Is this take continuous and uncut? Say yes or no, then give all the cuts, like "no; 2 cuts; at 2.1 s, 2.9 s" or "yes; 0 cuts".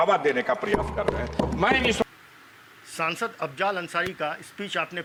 yes; 0 cuts